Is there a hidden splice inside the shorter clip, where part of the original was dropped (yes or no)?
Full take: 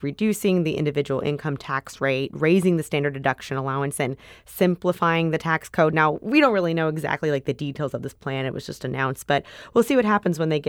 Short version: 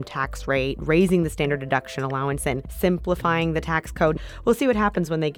yes